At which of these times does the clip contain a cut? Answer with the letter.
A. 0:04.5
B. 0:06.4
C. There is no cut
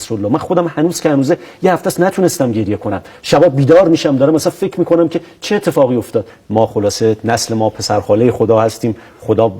B